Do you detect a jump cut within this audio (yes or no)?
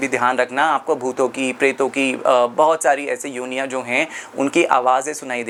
no